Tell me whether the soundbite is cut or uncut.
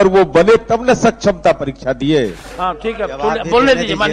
cut